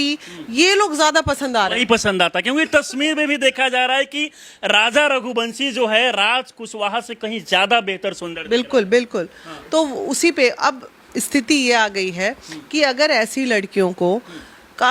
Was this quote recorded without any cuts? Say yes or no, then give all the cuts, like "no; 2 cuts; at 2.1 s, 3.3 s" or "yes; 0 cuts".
yes; 0 cuts